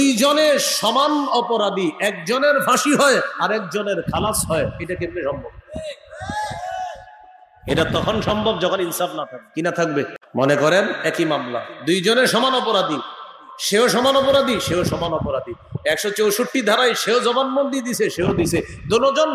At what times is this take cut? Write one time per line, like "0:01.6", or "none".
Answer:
0:09.4
0:10.2